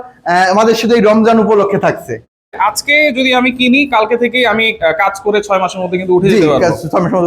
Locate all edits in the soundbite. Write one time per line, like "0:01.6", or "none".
0:02.2